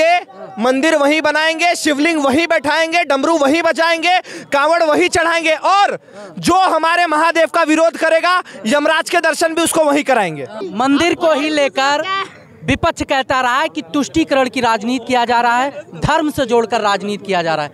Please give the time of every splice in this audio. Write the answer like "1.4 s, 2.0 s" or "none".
10.6 s